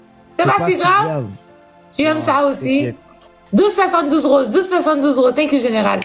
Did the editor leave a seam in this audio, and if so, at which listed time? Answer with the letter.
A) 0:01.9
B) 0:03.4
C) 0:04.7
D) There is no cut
D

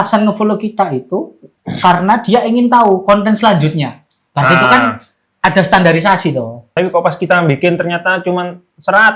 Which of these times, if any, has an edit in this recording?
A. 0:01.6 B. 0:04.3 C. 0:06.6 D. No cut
C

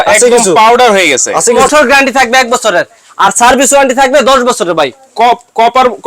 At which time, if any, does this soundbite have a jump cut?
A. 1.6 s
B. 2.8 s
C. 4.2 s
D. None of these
A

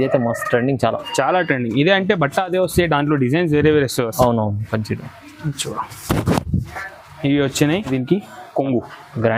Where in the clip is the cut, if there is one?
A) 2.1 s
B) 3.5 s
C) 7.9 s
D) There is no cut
C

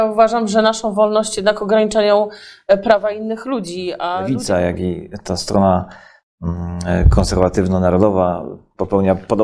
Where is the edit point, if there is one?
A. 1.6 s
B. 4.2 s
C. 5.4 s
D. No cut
B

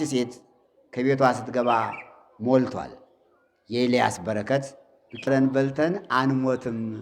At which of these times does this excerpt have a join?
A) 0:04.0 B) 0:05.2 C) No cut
B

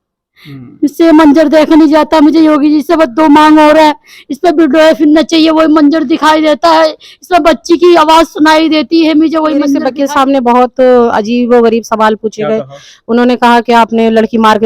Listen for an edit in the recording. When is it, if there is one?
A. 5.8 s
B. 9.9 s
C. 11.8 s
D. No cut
B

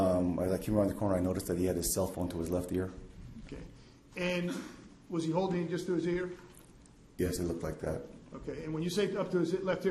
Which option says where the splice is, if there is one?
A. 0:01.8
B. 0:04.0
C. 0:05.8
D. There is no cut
C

